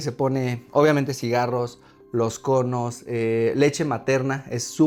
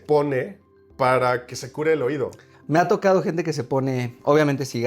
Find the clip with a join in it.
second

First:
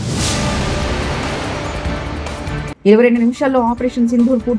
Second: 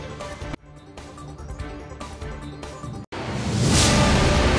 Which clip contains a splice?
first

